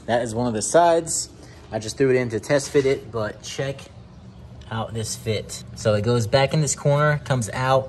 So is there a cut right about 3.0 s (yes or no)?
no